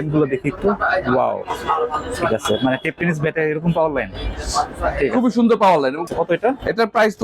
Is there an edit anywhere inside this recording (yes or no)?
yes